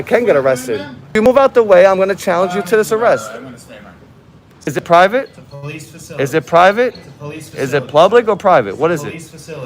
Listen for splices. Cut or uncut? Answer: cut